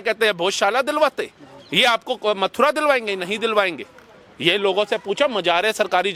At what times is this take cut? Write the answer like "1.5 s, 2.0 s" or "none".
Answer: none